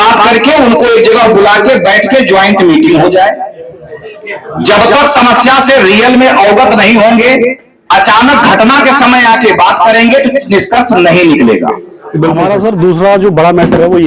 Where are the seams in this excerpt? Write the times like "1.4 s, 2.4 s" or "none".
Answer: 12.4 s